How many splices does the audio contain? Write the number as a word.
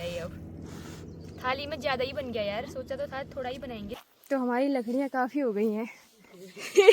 one